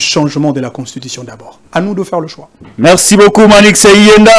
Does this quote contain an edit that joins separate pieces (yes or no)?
no